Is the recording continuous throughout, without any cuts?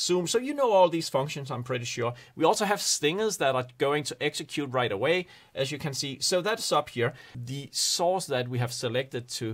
no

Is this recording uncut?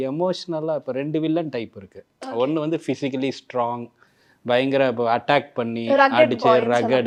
yes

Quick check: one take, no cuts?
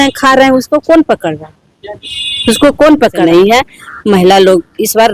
no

